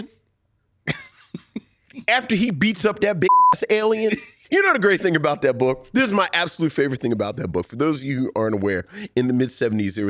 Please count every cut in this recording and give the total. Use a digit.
1